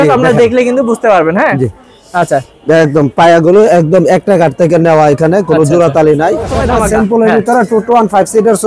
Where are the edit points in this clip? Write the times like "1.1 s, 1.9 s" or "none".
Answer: 6.6 s